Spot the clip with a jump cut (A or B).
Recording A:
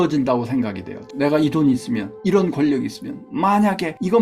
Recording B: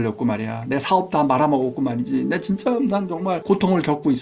A